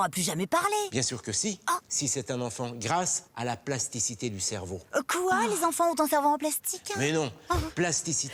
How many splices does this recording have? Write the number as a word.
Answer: zero